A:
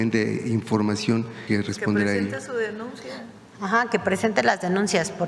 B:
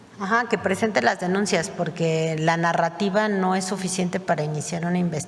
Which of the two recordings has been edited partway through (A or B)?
A